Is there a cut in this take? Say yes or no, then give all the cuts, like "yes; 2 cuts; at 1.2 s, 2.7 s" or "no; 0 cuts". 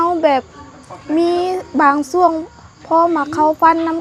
no; 0 cuts